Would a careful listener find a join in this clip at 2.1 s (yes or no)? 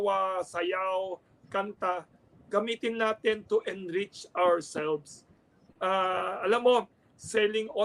no